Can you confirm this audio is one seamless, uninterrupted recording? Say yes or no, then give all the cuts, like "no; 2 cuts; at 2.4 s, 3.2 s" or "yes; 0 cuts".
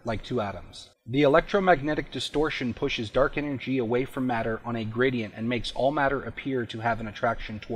yes; 0 cuts